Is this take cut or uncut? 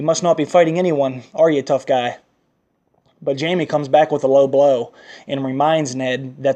cut